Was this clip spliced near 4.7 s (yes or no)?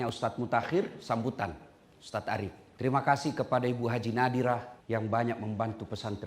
yes